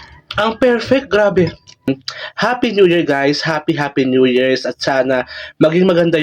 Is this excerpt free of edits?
no; 1 cut; at 1.9 s

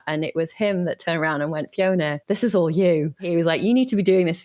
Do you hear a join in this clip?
yes; 2 cuts; at 2.2 s, 3.2 s

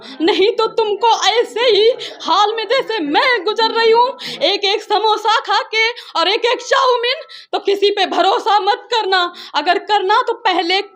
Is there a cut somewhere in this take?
no; 0 cuts

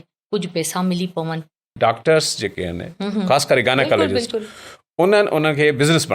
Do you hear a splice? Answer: yes; 1 cut; at 1.7 s

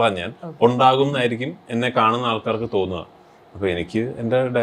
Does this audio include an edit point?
no; 0 cuts

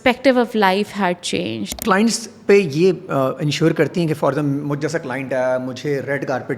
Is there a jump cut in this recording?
yes; 1 cut; at 1.7 s

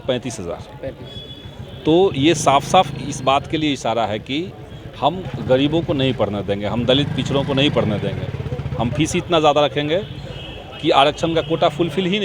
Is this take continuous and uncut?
yes; 0 cuts

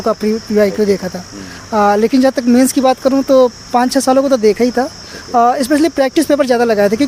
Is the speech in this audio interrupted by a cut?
no; 0 cuts

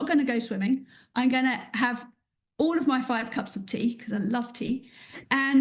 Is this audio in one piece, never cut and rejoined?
yes; 0 cuts

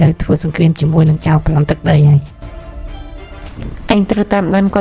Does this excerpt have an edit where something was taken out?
no; 0 cuts

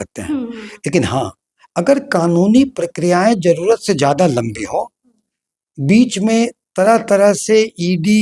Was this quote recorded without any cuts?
yes; 0 cuts

